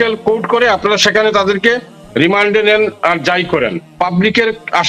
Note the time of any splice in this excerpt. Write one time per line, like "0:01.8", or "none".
none